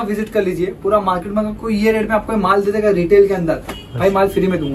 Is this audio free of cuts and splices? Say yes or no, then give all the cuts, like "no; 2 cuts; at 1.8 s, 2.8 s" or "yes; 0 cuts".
yes; 0 cuts